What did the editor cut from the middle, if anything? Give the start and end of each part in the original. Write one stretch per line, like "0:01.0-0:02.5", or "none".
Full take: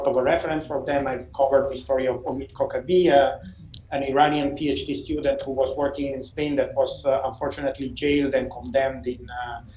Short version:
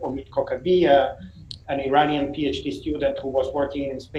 none